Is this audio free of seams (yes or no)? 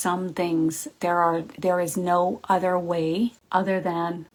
yes